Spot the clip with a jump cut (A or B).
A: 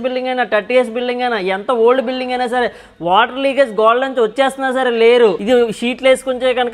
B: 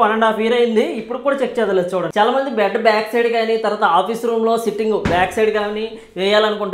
A